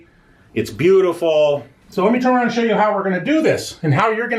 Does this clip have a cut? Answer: yes; 1 cut; at 1.8 s

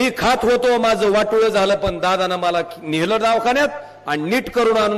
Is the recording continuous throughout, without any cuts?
yes; 0 cuts

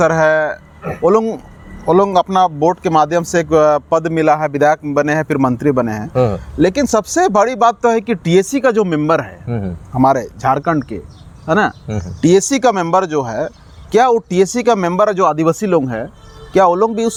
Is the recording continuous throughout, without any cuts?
yes; 0 cuts

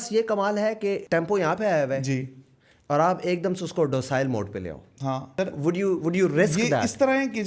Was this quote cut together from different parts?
yes; 2 cuts; at 1.0 s, 5.3 s

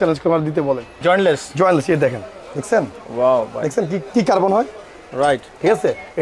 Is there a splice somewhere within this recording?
yes; 1 cut; at 1.0 s

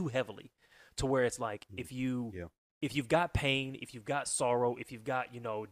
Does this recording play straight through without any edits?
yes; 0 cuts

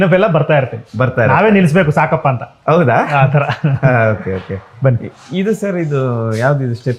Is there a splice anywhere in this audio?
no; 0 cuts

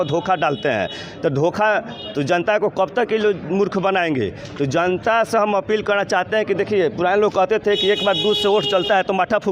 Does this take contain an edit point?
no; 0 cuts

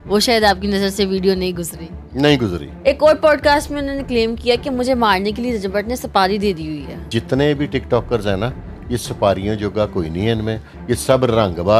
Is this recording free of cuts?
no; 2 cuts; at 2.7 s, 7.1 s

